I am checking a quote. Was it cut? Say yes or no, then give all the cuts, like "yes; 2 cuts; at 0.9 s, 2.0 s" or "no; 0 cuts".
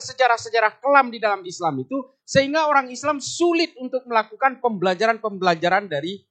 no; 0 cuts